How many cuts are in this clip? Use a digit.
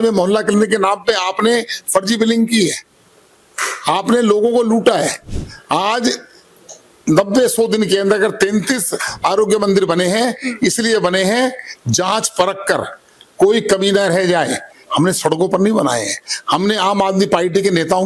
0